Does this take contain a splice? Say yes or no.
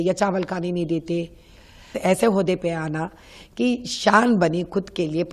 yes